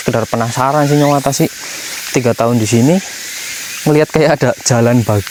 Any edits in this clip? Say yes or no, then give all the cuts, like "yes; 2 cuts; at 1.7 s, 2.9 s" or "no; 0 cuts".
no; 0 cuts